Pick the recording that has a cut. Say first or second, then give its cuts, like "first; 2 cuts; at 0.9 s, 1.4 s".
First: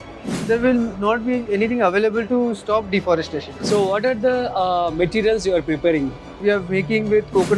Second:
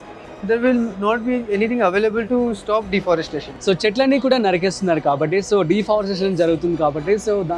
first; 2 cuts; at 3.5 s, 6.3 s